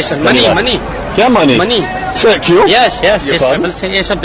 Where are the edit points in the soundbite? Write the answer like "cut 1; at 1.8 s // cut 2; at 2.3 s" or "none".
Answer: cut 1; at 3.2 s

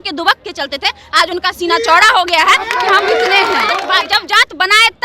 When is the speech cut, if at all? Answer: cut 1; at 3.8 s

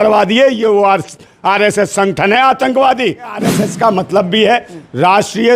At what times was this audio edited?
cut 1; at 3.4 s

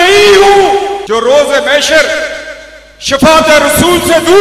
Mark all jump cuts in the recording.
cut 1; at 1.0 s

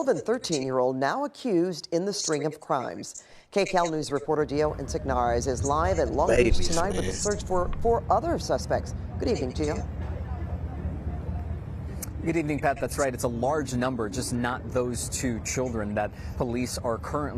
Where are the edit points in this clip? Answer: cut 1; at 2.1 s // cut 2; at 3.7 s

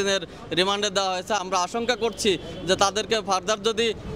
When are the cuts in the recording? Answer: none

